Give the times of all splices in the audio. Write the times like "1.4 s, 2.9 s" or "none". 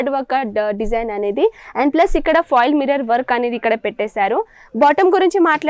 none